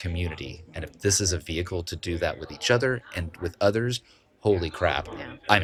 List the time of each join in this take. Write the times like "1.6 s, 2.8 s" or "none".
none